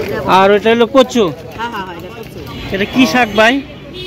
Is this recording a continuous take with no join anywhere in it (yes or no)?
no